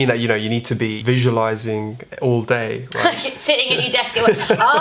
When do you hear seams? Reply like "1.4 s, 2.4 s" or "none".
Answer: 1.0 s

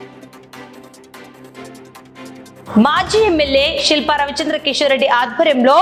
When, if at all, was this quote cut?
none

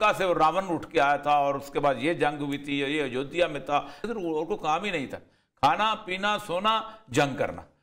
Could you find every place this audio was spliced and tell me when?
4.0 s

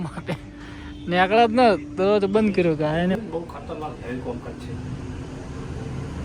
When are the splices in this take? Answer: 3.2 s

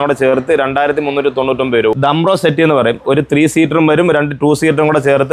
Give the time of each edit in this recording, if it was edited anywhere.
1.9 s

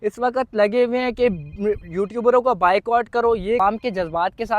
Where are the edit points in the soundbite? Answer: 3.6 s

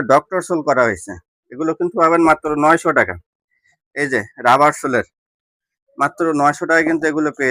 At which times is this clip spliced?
none

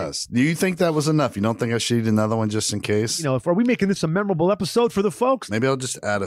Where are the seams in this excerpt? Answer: 3.2 s, 5.4 s

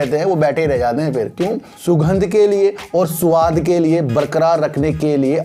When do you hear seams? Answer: 1.7 s

